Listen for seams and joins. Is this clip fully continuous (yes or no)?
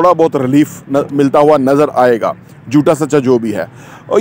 yes